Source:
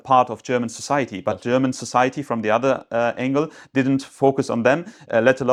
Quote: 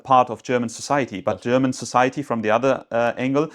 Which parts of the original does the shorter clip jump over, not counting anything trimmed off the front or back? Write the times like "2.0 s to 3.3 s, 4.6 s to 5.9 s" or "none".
none